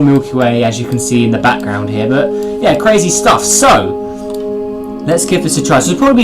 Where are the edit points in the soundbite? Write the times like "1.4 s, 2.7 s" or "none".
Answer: 1.0 s